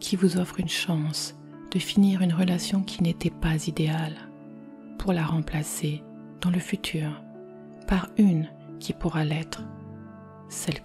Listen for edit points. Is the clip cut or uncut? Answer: uncut